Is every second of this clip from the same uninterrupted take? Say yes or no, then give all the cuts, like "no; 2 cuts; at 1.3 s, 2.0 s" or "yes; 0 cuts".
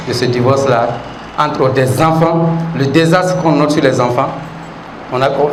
yes; 0 cuts